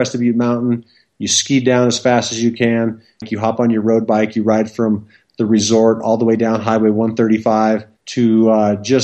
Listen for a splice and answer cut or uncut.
cut